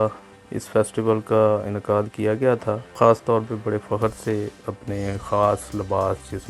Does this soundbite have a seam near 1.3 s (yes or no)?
no